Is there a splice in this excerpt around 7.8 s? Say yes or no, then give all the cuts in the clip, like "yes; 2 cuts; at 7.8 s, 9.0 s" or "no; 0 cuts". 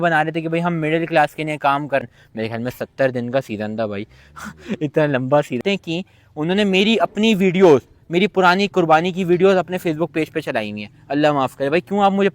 no; 2 cuts; at 2.0 s, 5.6 s